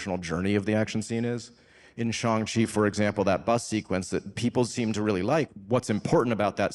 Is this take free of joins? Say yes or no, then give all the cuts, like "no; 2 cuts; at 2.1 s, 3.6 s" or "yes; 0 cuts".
no; 1 cut; at 5.5 s